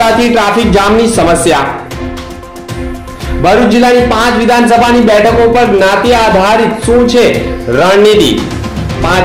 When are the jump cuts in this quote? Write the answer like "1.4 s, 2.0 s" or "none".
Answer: none